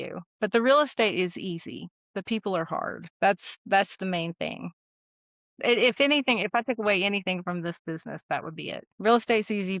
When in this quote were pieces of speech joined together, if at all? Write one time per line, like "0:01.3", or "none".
0:03.1
0:08.9